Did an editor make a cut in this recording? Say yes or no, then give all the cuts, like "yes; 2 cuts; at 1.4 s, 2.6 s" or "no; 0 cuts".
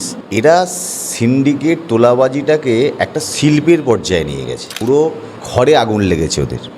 yes; 1 cut; at 4.6 s